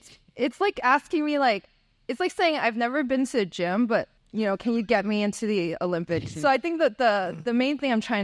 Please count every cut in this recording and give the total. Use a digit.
2